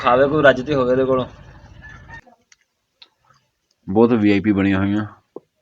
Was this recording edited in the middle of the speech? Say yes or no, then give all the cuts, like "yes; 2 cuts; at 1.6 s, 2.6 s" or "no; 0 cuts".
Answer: yes; 1 cut; at 2.2 s